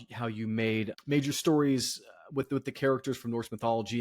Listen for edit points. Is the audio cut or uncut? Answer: cut